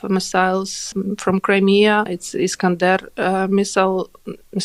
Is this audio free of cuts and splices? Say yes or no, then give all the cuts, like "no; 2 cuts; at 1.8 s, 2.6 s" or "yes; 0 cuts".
no; 2 cuts; at 0.9 s, 2.2 s